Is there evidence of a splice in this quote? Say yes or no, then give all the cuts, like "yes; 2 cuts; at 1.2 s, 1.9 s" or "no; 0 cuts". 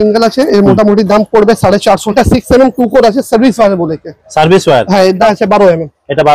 yes; 2 cuts; at 2.1 s, 5.2 s